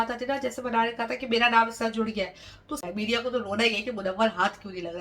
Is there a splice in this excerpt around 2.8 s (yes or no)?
yes